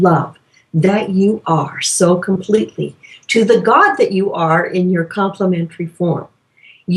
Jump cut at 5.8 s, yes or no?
no